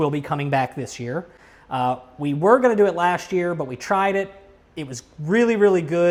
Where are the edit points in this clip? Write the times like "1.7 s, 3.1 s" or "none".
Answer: none

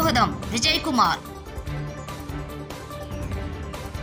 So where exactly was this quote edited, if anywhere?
none

